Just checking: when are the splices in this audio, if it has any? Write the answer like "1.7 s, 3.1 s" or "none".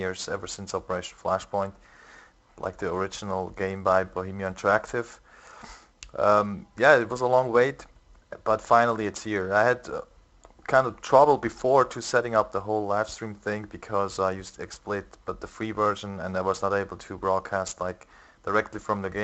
none